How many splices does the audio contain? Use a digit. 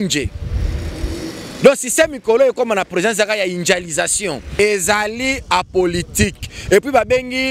1